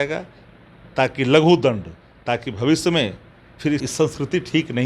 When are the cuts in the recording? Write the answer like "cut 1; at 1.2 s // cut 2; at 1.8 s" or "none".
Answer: cut 1; at 3.8 s